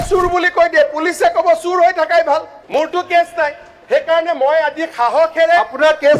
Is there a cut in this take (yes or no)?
yes